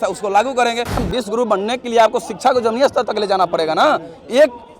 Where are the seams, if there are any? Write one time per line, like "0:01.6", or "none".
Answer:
0:01.0